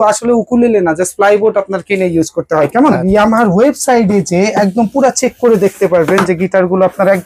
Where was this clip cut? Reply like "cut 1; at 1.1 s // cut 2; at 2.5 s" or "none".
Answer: cut 1; at 2.8 s